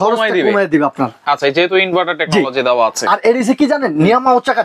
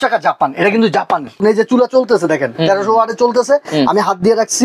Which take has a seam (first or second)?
second